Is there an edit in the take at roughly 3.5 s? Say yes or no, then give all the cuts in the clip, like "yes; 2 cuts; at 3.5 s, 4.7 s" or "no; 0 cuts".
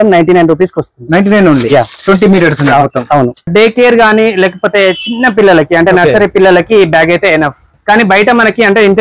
yes; 1 cut; at 3.5 s